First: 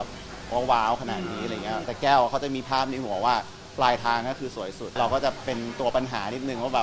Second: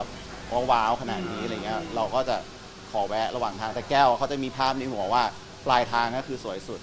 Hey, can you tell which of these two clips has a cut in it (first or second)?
first